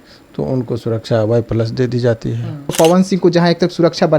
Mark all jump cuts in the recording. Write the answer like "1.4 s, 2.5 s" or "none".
2.7 s

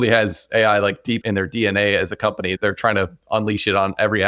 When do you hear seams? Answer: 1.2 s, 2.6 s

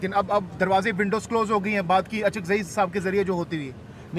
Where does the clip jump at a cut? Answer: 1.3 s

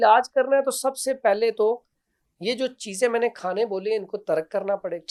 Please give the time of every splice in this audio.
none

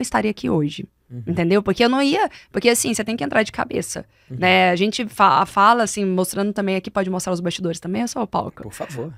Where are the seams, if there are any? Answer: none

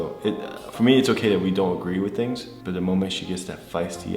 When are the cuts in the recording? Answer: 2.5 s

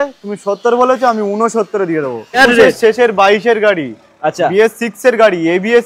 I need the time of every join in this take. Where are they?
2.4 s

